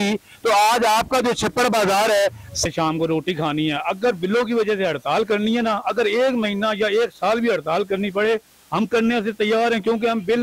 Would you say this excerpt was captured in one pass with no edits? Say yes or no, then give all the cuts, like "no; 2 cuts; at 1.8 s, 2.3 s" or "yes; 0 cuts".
no; 1 cut; at 2.6 s